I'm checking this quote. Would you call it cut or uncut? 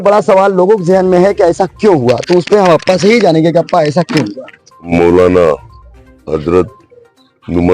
cut